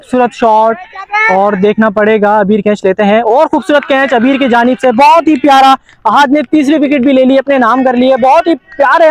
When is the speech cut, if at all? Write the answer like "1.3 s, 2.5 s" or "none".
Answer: none